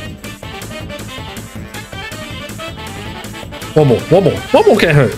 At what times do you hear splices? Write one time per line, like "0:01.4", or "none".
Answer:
none